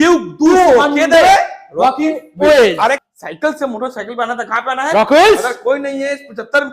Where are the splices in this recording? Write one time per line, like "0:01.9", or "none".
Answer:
0:03.0